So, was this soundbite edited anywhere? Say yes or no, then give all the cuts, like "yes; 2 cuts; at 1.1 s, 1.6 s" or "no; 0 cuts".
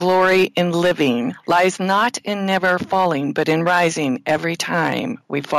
yes; 1 cut; at 1.4 s